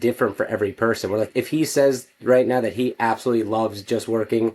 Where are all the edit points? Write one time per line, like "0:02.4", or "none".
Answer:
0:01.3

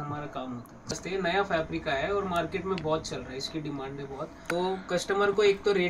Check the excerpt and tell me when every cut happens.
0:00.9
0:04.4

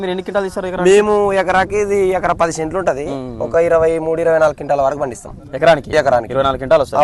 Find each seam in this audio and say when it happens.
none

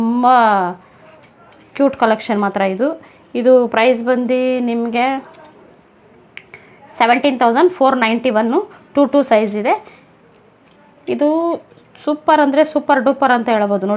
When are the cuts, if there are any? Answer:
none

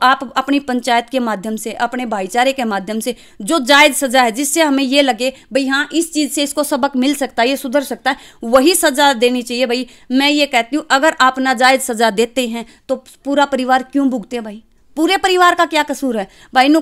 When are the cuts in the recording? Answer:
none

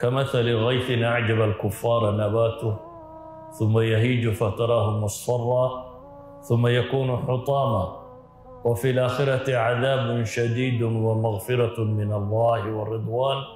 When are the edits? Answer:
none

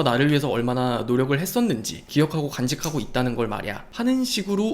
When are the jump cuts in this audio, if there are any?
0:02.0
0:03.8

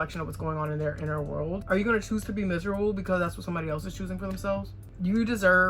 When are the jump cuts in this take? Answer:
0:01.6
0:04.9

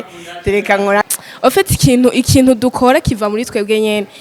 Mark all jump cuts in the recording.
0:01.1

